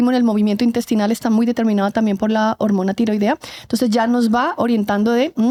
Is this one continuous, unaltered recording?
yes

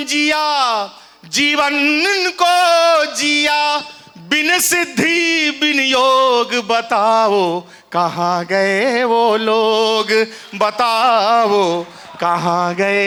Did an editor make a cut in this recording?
no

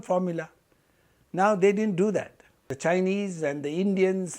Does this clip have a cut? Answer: yes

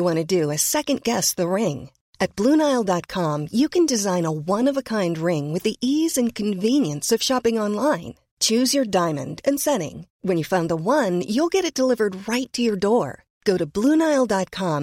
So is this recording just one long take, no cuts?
yes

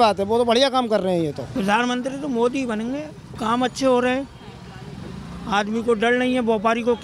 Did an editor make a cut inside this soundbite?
yes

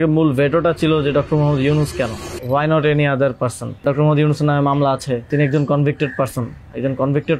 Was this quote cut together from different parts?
yes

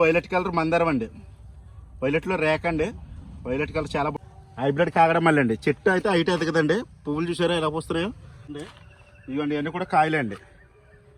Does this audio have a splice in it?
yes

